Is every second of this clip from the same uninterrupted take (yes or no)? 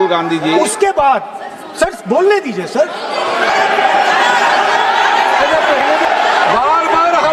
no